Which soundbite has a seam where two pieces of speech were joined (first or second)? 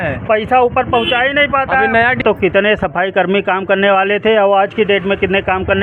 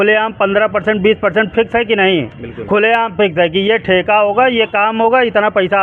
first